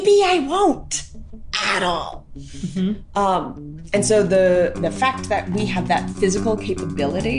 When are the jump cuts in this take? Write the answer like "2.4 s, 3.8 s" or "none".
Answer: none